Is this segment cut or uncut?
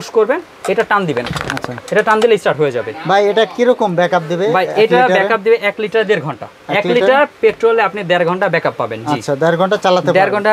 uncut